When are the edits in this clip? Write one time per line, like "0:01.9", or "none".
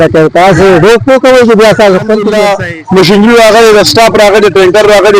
0:02.4